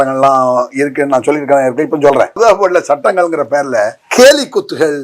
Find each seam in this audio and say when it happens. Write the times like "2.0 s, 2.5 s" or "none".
2.4 s, 4.0 s